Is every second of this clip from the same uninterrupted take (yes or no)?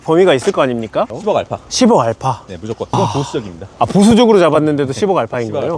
no